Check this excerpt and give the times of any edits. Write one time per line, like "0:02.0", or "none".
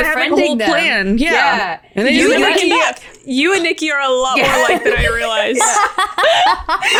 none